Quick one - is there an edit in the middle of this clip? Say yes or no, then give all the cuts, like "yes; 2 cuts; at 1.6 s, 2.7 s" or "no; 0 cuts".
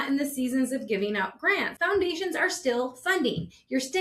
yes; 1 cut; at 1.7 s